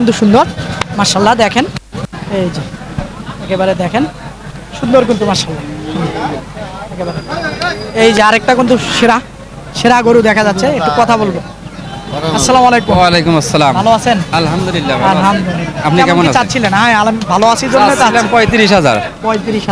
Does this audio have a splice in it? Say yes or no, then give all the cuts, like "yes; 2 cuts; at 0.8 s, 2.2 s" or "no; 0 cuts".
no; 0 cuts